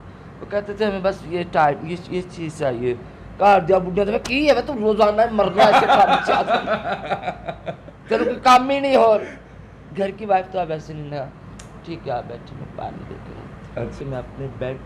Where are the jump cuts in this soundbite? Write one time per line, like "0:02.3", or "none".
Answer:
0:13.9